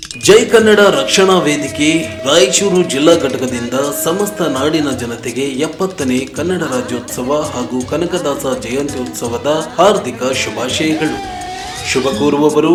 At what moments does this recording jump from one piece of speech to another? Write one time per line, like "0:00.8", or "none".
none